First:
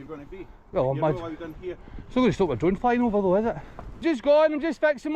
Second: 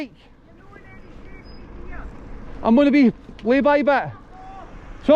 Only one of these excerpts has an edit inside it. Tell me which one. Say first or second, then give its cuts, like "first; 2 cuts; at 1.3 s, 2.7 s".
first; 1 cut; at 4.0 s